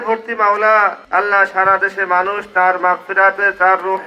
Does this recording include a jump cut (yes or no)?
yes